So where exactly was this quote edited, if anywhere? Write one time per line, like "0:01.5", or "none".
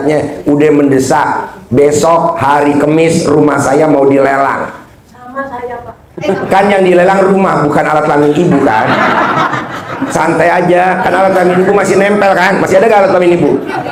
none